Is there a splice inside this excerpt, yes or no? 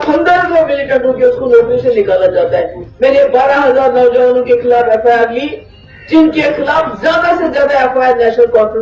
no